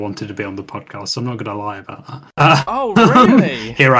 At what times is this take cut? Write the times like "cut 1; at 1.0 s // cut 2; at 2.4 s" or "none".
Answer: none

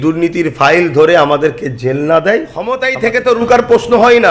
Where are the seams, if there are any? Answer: cut 1; at 2.8 s

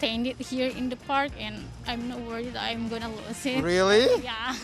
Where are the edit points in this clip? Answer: none

